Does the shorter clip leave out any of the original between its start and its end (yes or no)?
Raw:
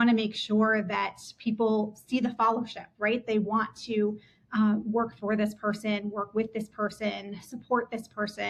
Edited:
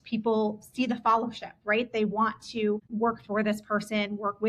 yes